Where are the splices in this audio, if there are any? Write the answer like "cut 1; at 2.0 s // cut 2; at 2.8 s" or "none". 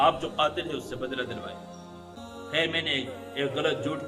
cut 1; at 2.2 s

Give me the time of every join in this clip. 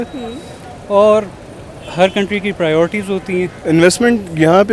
cut 1; at 3.6 s

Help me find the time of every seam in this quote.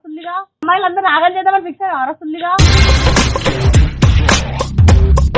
none

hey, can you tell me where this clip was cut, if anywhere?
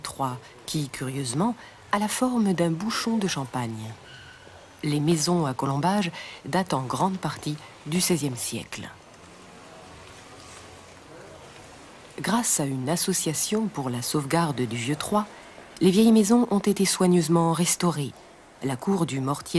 cut 1; at 1.7 s

